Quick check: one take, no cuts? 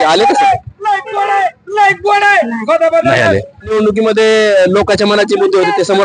no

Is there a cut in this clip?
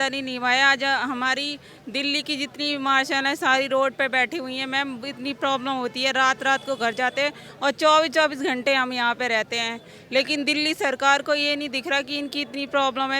no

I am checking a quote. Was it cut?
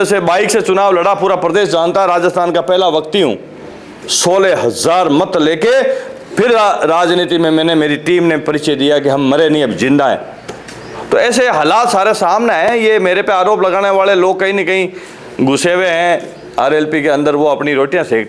no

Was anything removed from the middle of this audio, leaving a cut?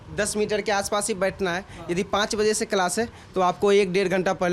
no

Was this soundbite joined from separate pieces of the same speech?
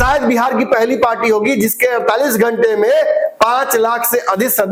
no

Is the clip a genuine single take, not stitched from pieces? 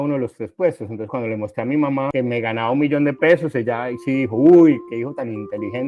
no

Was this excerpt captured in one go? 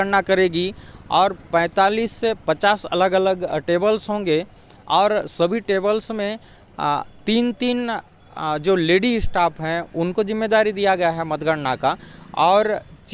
yes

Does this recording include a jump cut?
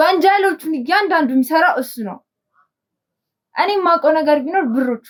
no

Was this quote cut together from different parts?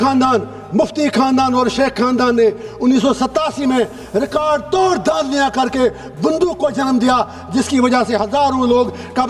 no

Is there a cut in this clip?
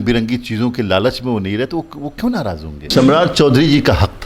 yes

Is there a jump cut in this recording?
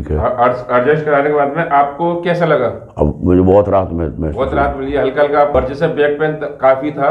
yes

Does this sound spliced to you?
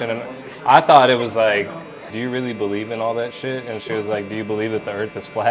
yes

